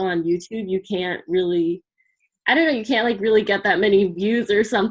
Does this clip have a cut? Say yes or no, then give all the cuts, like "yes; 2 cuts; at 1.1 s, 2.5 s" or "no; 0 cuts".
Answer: no; 0 cuts